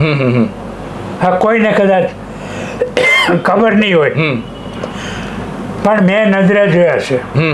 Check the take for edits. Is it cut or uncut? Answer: uncut